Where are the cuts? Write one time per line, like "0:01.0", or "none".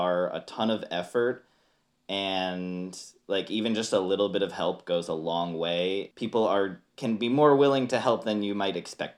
0:06.1
0:06.9